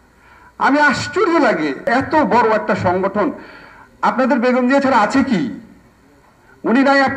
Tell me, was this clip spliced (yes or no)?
yes